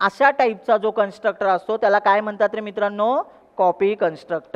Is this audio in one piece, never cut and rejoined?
yes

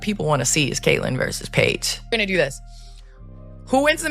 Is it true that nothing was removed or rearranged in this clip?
no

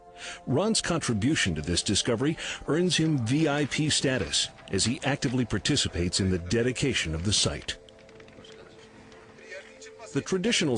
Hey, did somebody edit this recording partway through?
yes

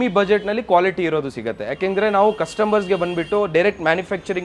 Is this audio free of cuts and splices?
yes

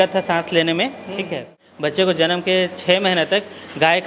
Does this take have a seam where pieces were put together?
yes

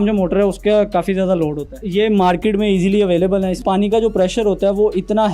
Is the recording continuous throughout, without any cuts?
no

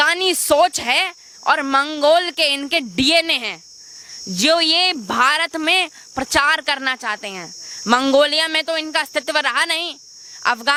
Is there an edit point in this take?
no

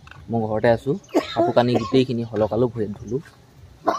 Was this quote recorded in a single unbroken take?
yes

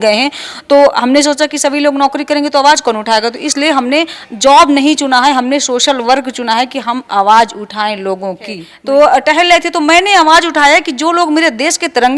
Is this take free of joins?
no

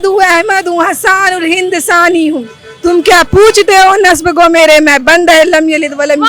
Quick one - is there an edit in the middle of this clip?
no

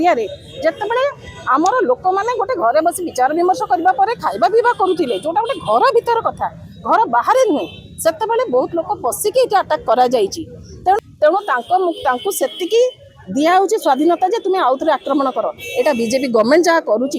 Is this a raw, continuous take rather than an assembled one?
no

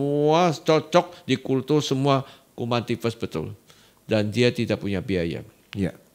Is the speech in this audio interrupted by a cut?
no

